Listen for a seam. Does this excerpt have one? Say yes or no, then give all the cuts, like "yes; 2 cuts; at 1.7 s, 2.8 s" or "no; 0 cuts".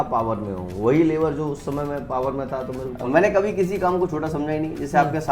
yes; 1 cut; at 2.9 s